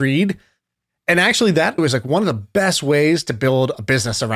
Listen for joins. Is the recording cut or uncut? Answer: cut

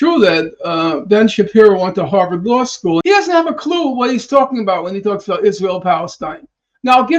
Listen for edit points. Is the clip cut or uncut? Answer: cut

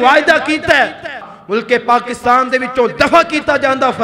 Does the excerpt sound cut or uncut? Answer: cut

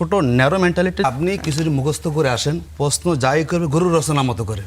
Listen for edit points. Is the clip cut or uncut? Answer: cut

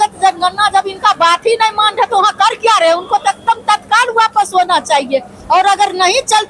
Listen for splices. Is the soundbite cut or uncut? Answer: uncut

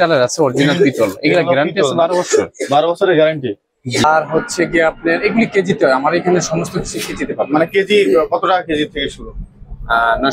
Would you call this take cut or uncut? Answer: cut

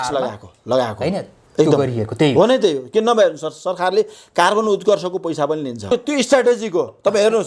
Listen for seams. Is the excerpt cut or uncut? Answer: cut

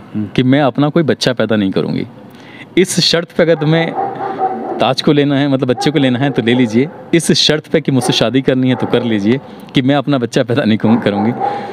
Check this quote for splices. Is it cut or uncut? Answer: uncut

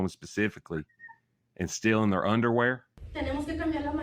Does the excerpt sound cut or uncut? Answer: cut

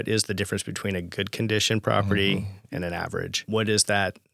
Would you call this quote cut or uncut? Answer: cut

